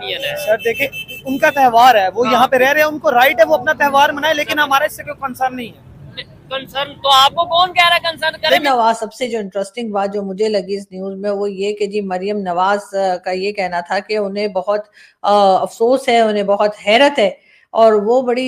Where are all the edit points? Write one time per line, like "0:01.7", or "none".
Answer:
0:08.6